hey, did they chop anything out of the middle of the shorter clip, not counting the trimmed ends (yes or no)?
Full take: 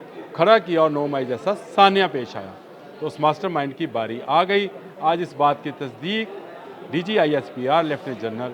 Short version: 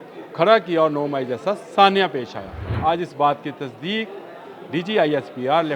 yes